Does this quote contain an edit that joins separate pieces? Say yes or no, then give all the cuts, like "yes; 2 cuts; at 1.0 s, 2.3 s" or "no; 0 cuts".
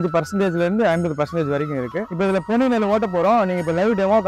yes; 1 cut; at 2.0 s